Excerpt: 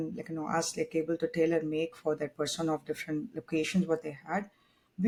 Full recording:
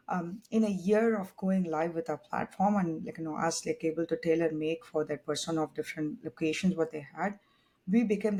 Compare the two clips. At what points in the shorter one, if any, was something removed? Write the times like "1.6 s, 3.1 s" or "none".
none